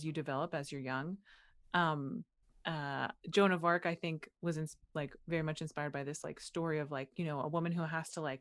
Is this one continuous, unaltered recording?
yes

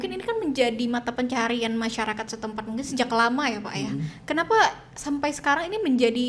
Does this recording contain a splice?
no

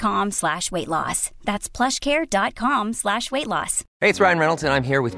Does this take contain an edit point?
yes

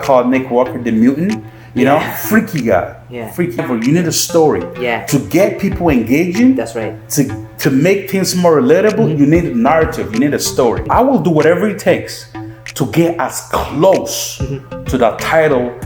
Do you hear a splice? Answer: yes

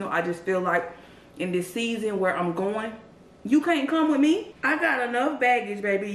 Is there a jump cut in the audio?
no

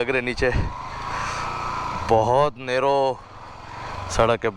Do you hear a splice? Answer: no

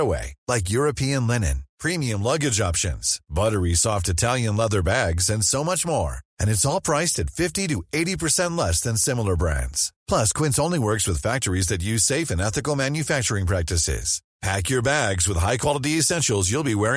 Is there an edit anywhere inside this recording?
no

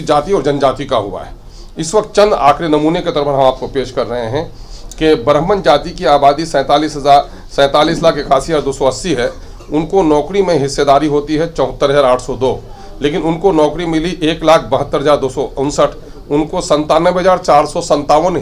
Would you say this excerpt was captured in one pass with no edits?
yes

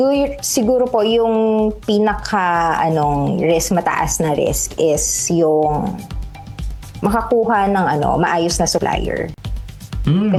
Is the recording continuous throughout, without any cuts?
yes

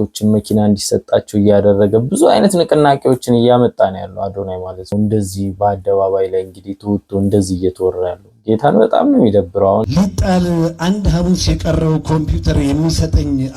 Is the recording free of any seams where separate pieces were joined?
no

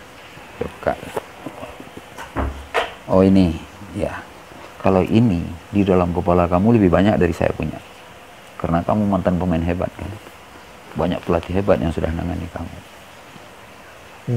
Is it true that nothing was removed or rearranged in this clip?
yes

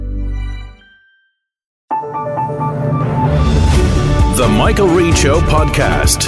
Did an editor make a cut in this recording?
yes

